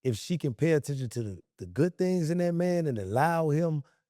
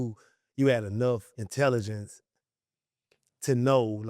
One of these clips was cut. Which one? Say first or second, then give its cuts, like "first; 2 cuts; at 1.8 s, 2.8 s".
second; 1 cut; at 1.4 s